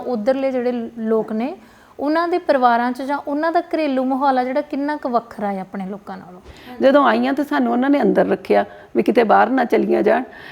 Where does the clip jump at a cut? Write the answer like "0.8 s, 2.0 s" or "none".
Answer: 6.8 s